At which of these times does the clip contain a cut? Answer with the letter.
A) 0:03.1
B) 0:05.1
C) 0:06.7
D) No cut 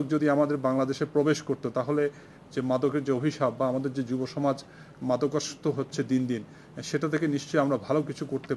D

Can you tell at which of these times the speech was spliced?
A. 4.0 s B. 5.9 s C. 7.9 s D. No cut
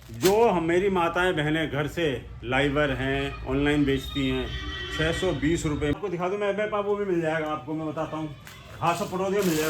B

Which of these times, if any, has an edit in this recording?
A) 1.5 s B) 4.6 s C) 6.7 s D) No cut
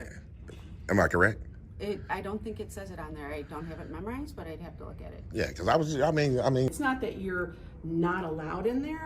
C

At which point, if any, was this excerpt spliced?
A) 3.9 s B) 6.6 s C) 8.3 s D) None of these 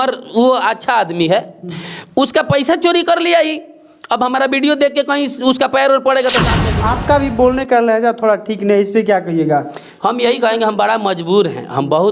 B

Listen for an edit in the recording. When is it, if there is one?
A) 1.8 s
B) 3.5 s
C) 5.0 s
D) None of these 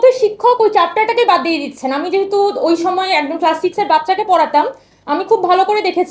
D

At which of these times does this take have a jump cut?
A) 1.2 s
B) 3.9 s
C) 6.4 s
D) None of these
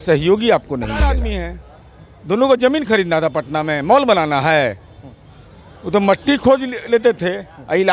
A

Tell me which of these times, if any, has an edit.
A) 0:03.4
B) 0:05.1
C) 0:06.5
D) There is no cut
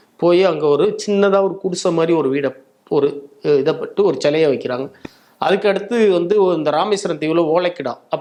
D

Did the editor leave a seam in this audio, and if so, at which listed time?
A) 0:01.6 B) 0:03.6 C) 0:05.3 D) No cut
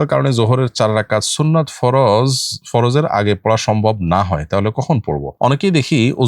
C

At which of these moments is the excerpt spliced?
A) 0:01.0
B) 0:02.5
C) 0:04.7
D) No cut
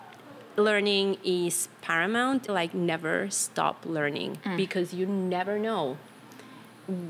B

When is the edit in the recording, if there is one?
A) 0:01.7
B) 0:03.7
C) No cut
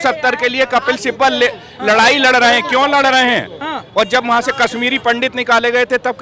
C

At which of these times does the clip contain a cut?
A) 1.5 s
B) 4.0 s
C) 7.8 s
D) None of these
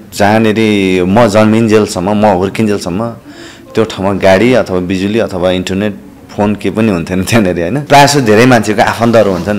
C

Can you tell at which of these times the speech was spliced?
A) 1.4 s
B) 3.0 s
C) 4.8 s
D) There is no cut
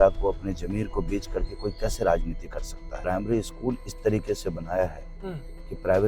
B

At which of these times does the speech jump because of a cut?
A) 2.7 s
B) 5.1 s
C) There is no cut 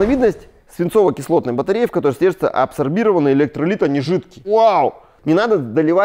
B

